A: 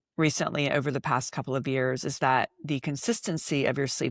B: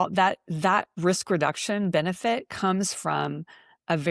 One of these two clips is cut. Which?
B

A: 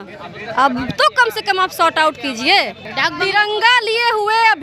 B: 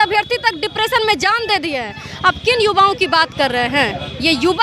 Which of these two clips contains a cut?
A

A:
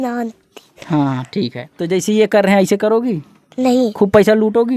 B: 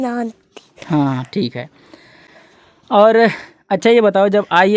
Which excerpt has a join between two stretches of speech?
A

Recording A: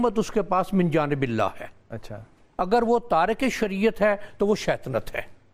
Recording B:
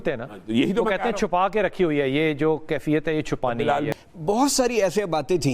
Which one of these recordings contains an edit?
B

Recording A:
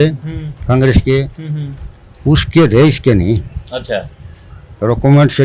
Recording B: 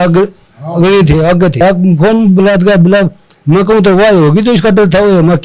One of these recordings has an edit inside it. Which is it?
B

